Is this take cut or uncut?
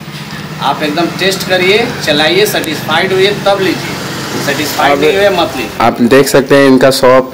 cut